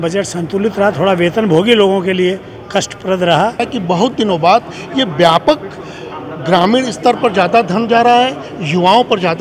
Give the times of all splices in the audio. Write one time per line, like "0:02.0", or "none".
0:03.7